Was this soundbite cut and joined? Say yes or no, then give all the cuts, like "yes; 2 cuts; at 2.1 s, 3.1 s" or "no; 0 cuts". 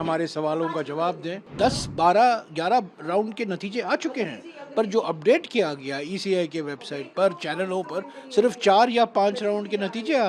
yes; 1 cut; at 1.5 s